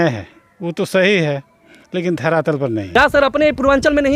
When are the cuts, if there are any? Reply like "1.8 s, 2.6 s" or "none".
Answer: 2.9 s